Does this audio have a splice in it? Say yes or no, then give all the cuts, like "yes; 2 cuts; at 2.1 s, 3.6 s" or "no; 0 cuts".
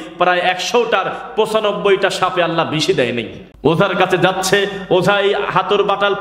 yes; 1 cut; at 3.4 s